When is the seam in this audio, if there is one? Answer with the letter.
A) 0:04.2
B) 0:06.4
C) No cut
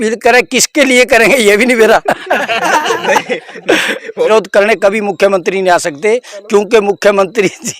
A